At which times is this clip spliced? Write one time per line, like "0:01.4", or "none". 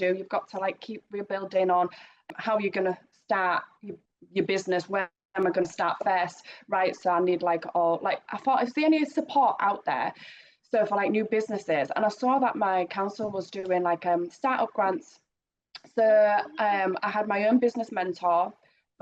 0:02.3

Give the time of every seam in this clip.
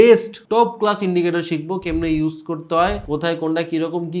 0:03.0

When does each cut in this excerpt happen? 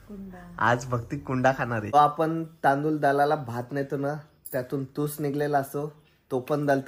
0:01.9

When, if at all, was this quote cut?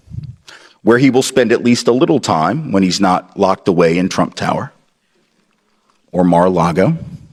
none

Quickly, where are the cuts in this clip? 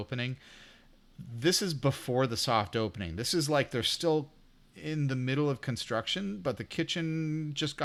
none

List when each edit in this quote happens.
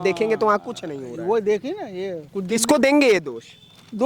0:02.2

